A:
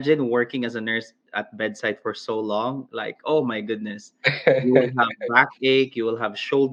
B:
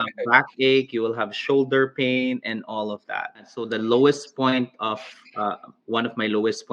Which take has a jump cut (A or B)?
B